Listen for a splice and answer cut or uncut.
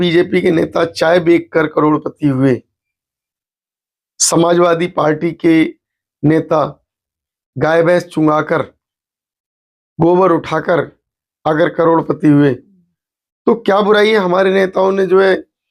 uncut